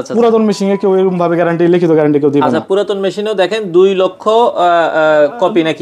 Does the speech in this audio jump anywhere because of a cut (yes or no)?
no